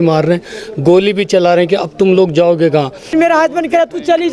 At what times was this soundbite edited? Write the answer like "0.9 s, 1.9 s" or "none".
3.1 s